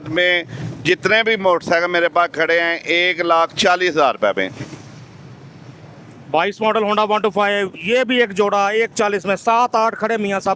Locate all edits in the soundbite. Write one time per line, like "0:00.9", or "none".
none